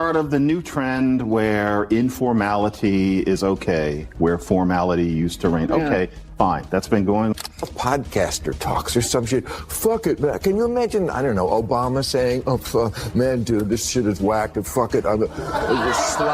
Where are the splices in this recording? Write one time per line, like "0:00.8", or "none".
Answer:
0:07.7